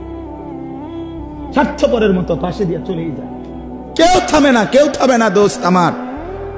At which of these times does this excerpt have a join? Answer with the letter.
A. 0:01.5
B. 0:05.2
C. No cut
A